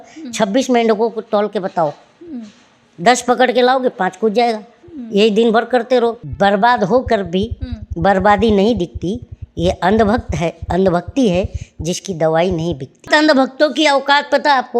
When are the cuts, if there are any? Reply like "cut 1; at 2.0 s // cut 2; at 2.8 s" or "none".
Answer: cut 1; at 6.2 s // cut 2; at 13.1 s